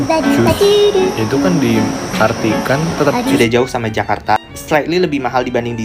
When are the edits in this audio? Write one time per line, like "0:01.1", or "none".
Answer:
0:03.4